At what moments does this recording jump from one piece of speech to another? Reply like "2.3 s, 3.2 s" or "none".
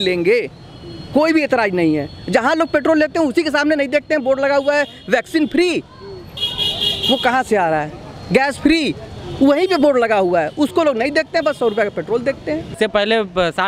12.7 s